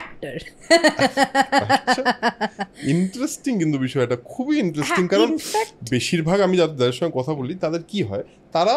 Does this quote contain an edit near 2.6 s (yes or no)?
no